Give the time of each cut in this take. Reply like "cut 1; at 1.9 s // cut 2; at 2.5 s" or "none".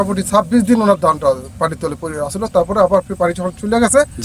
none